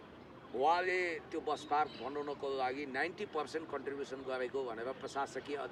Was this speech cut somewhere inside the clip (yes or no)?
no